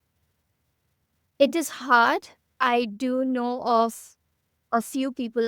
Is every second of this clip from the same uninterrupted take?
yes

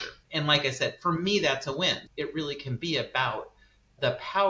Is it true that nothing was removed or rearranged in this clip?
no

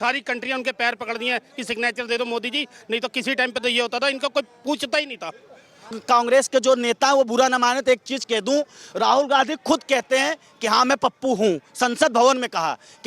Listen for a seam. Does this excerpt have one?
yes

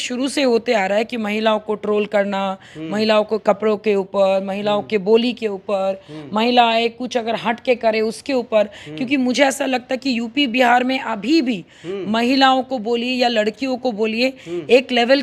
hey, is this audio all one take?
yes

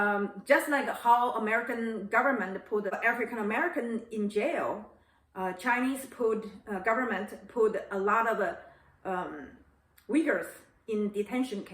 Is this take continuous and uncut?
no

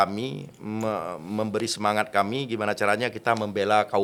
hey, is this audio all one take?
yes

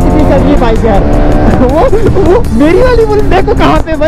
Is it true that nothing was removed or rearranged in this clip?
yes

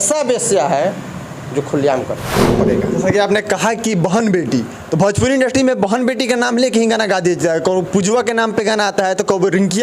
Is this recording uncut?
no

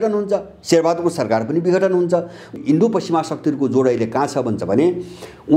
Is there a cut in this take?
yes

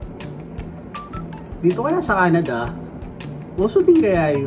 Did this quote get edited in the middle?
no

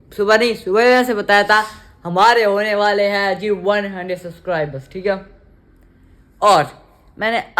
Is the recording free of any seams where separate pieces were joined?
yes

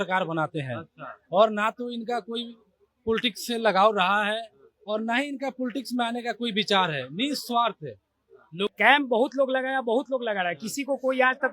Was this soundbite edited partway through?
yes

